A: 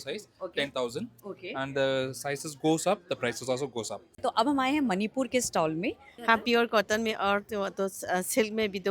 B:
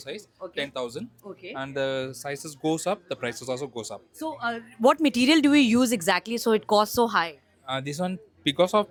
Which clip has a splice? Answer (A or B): A